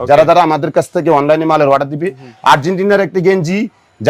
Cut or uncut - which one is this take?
uncut